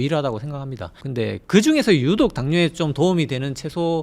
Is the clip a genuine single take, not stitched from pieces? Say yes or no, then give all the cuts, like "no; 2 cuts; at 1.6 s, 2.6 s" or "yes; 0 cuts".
no; 1 cut; at 1.0 s